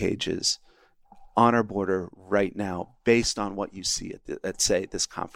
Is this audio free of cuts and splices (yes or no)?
yes